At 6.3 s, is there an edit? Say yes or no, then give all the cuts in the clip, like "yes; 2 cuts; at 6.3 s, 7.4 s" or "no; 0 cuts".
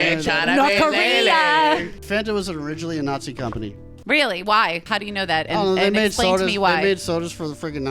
no; 2 cuts; at 2.0 s, 4.8 s